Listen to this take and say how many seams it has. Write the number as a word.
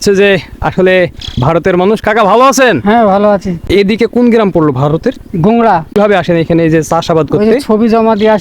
two